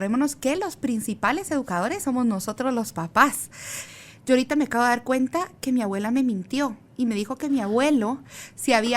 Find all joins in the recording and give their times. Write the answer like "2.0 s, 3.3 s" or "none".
3.8 s